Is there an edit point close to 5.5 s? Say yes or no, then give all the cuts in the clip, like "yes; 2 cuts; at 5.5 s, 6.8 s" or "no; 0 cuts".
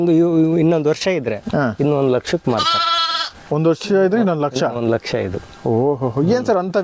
no; 0 cuts